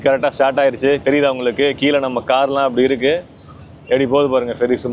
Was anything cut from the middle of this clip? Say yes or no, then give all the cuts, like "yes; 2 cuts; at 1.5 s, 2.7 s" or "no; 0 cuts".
no; 0 cuts